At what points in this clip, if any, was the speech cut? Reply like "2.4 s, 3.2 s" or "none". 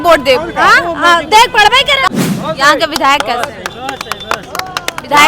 2.0 s